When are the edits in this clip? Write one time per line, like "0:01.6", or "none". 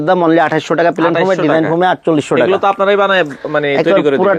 none